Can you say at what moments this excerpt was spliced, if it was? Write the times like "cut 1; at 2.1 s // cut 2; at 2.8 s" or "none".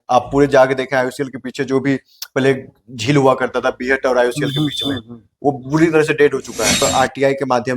cut 1; at 6.8 s